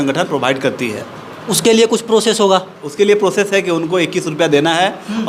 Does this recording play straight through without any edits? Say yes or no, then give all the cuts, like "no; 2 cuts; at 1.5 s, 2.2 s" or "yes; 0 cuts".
yes; 0 cuts